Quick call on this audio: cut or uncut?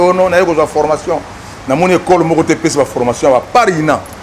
uncut